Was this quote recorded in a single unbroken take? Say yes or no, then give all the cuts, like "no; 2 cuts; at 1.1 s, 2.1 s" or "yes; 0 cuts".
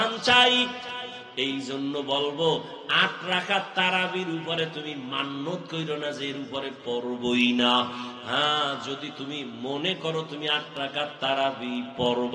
no; 1 cut; at 1.2 s